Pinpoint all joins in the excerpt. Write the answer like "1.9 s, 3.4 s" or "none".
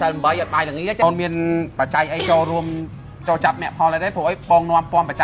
1.0 s